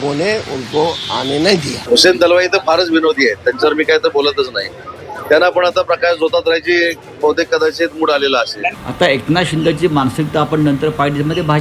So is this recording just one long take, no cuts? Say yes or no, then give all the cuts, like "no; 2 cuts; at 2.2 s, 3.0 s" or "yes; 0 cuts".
no; 1 cut; at 8.8 s